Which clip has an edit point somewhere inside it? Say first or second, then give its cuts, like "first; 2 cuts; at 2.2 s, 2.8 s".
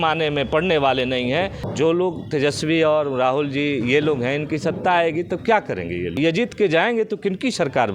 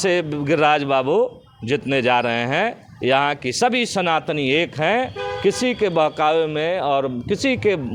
first; 2 cuts; at 1.6 s, 6.1 s